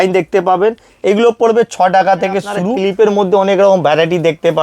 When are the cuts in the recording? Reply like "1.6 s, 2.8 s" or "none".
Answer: 2.7 s